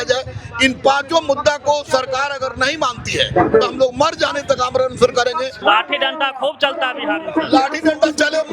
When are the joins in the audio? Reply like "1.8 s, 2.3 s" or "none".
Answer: 5.5 s

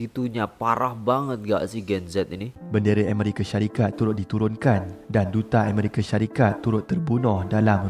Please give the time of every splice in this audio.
2.5 s

